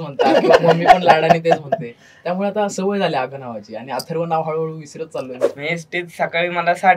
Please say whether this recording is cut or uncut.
cut